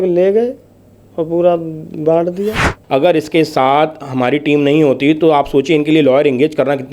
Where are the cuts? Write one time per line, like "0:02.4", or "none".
0:02.7